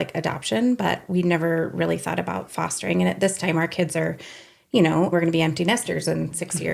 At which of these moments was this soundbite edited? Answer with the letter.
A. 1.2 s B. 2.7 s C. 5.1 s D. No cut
C